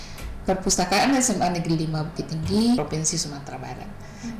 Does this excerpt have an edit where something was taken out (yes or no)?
yes